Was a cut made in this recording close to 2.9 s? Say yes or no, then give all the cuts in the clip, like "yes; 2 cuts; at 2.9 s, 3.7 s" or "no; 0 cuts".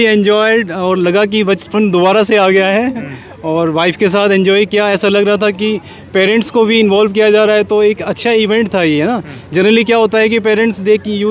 no; 0 cuts